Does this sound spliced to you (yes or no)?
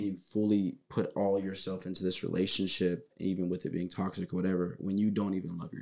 no